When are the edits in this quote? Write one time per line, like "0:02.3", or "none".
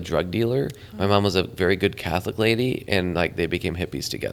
none